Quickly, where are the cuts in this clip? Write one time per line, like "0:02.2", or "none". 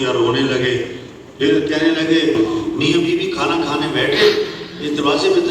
0:02.3